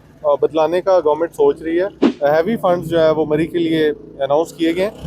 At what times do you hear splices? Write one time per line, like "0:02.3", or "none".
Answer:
0:02.0